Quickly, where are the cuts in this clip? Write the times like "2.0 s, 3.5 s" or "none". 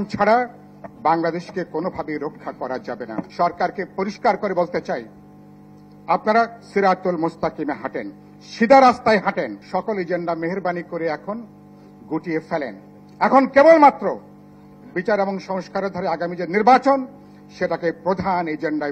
3.3 s, 9.6 s